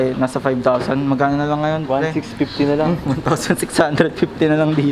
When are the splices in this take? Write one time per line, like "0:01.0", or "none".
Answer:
none

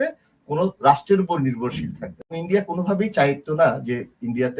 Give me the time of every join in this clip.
0:02.4

